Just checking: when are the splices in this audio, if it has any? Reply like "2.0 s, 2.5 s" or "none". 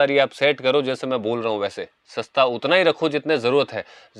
none